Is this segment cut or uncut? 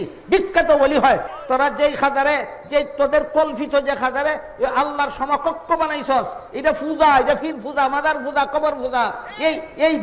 cut